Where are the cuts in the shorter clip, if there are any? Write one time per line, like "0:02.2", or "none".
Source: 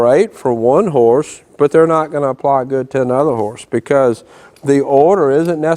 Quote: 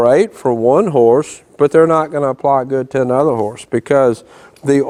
none